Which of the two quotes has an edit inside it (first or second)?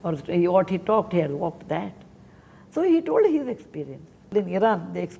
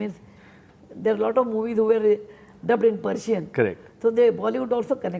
first